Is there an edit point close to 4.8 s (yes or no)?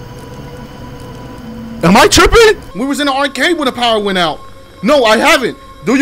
no